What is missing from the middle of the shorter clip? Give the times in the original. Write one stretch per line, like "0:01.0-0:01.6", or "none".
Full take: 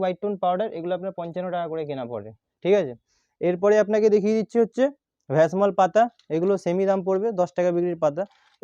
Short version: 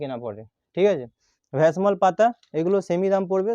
0:03.2-0:05.1